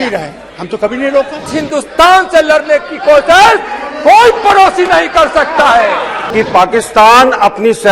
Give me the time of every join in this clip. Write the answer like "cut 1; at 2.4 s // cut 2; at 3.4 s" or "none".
cut 1; at 1.6 s // cut 2; at 6.2 s